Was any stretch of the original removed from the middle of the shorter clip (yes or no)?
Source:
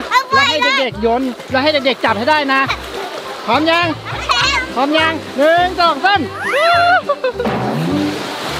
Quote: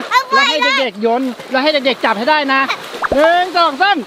yes